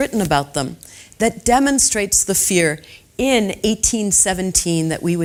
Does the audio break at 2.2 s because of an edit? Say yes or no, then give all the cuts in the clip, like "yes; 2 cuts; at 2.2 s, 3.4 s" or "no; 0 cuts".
no; 0 cuts